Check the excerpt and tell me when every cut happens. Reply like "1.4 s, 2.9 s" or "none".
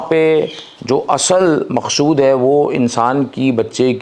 none